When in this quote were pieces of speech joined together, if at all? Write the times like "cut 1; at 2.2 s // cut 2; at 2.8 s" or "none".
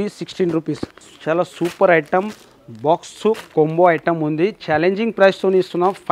cut 1; at 1.1 s